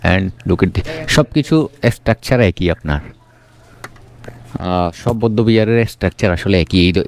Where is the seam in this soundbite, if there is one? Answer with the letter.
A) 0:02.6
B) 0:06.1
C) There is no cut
C